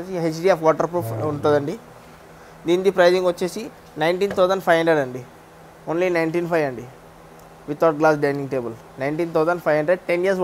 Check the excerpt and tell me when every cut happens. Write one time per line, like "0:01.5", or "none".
none